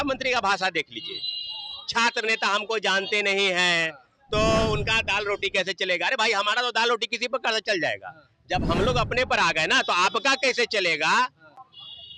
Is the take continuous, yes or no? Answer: yes